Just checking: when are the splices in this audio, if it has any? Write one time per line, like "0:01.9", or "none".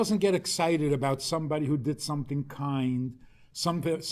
none